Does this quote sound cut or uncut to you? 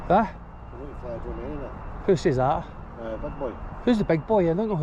uncut